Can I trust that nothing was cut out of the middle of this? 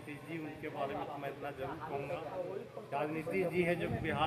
yes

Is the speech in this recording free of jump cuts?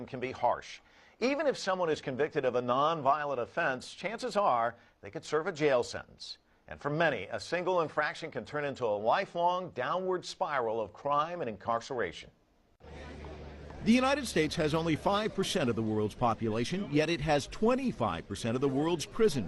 yes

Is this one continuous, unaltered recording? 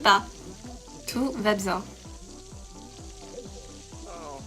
no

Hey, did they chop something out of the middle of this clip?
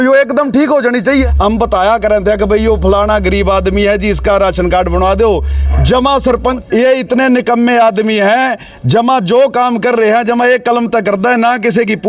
yes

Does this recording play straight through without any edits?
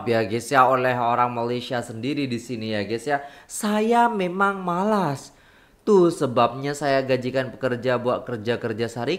yes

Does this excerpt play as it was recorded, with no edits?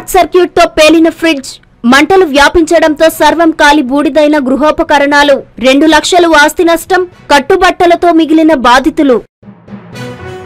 no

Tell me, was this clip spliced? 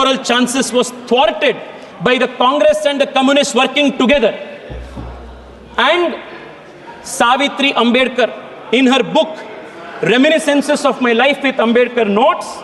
no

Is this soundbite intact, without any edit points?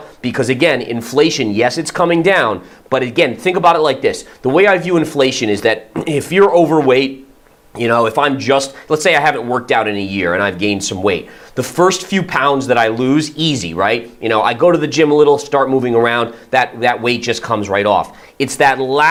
yes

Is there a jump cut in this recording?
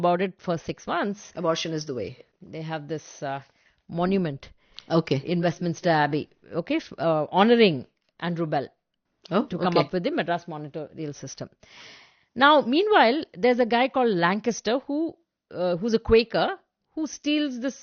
yes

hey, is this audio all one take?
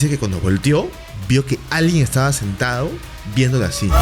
yes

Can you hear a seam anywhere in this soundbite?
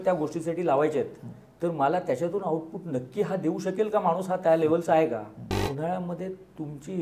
yes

